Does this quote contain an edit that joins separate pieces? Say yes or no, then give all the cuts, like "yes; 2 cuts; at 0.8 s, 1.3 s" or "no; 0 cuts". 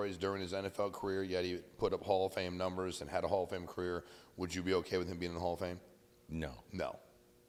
no; 0 cuts